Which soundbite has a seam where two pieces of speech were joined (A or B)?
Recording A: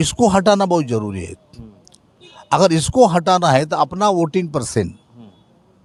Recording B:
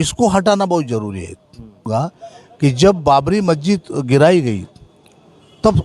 B